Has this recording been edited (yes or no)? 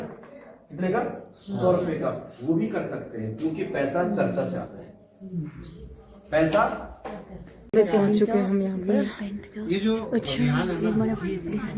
yes